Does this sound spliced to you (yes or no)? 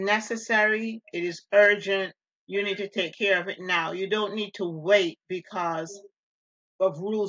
no